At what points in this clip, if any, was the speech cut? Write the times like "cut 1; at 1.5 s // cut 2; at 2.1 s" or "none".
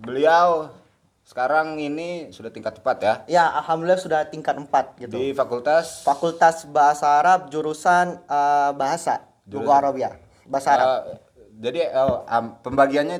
none